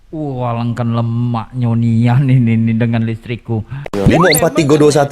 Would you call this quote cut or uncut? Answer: cut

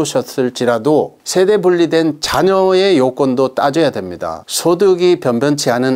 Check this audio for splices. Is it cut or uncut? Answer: cut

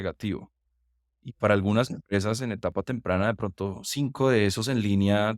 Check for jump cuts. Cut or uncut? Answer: uncut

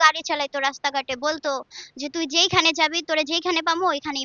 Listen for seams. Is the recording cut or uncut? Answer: uncut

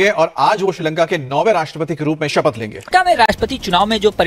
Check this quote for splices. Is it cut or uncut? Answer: uncut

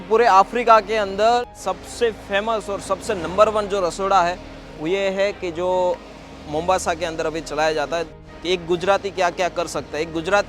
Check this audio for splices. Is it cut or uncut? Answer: cut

